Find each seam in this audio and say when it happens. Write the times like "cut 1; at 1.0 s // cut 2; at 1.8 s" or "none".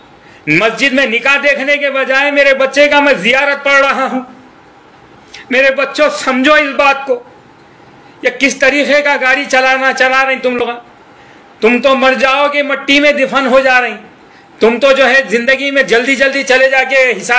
none